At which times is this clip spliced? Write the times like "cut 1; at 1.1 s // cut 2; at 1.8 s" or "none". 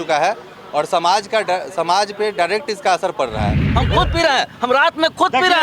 cut 1; at 3.7 s